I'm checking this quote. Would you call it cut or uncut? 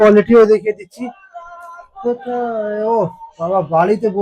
uncut